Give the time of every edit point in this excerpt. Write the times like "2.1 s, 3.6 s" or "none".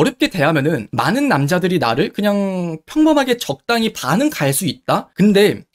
none